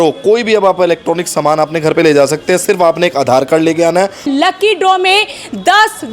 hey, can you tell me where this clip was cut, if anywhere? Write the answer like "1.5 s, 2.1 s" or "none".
4.3 s